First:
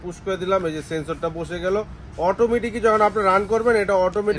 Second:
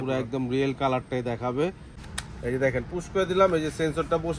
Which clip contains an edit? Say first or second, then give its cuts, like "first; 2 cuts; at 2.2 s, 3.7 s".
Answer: second; 1 cut; at 1.8 s